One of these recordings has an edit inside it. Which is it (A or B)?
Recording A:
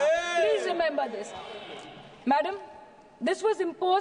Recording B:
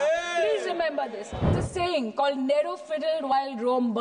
B